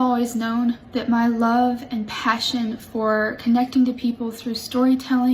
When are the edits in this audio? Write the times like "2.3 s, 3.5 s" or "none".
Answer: none